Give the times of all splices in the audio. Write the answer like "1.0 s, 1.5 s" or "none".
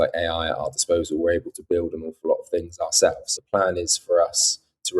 3.3 s